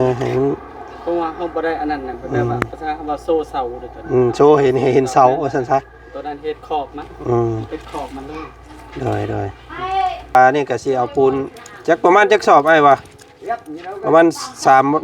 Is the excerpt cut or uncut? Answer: cut